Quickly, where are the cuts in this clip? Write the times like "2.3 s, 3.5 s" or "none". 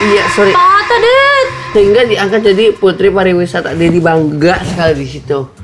1.7 s